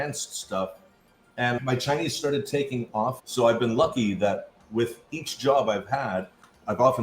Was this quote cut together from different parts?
yes; 2 cuts; at 1.6 s, 3.2 s

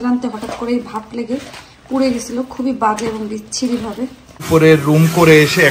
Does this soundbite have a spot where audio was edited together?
yes; 1 cut; at 4.4 s

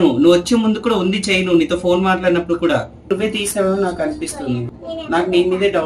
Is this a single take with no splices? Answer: no; 2 cuts; at 3.1 s, 4.7 s

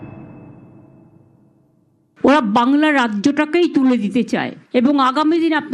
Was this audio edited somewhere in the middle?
yes; 1 cut; at 2.1 s

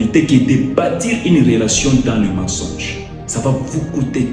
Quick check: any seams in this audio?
no; 0 cuts

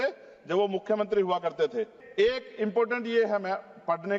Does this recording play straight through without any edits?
no; 1 cut; at 2.0 s

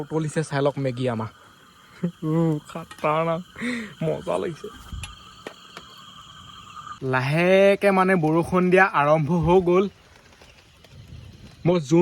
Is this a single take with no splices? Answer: no; 1 cut; at 7.0 s

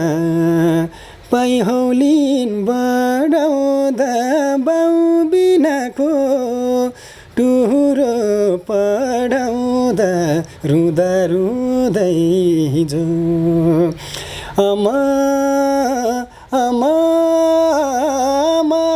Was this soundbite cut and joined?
no; 0 cuts

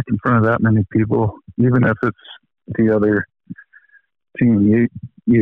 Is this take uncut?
yes; 0 cuts

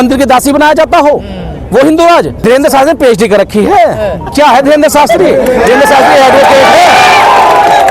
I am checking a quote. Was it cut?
yes; 1 cut; at 2.4 s

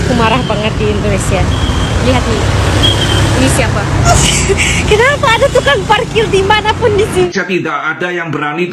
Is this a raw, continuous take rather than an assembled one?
no; 2 cuts; at 4.1 s, 7.3 s

